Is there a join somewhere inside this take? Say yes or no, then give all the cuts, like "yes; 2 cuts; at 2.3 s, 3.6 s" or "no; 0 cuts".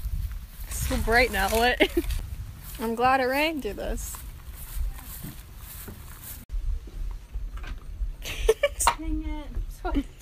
no; 0 cuts